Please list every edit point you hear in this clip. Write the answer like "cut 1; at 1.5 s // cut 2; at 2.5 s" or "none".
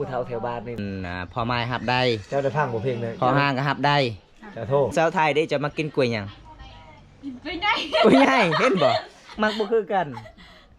cut 1; at 0.8 s // cut 2; at 4.9 s